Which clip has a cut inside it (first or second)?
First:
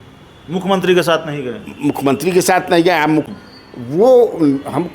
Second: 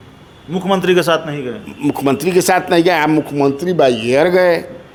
first